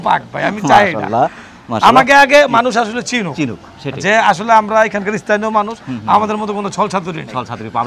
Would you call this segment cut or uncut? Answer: uncut